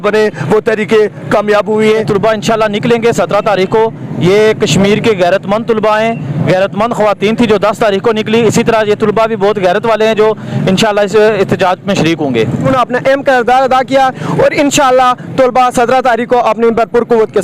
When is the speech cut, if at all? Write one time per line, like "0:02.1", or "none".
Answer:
0:02.1
0:12.7